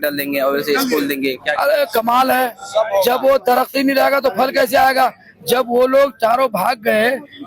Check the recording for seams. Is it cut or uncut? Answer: uncut